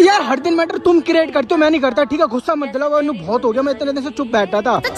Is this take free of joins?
yes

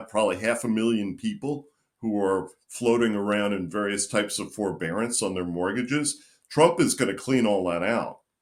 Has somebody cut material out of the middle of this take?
no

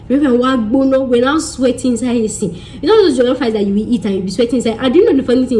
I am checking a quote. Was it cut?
no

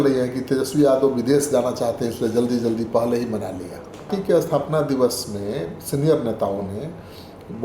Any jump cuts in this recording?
yes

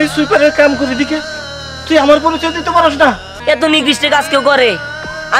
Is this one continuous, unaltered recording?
no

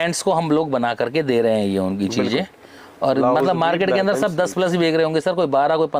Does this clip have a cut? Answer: no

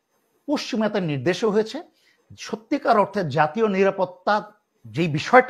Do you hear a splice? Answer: no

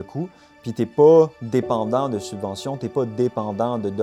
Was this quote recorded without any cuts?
yes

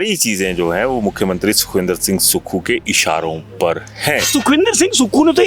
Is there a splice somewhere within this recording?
yes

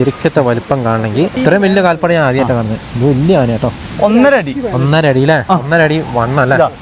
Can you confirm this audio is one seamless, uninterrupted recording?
no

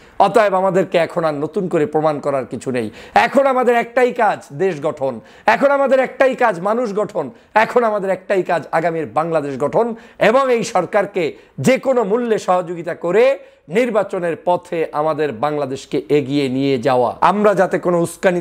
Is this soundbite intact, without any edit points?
no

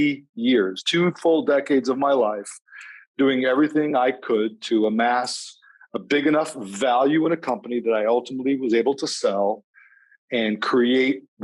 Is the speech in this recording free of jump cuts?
yes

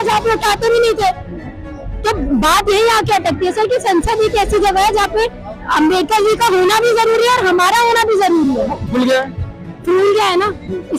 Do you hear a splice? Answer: yes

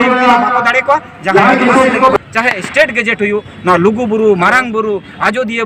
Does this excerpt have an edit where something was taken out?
yes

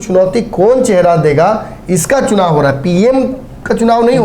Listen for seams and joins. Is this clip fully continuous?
yes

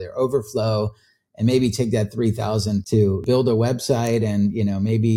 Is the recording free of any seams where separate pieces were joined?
no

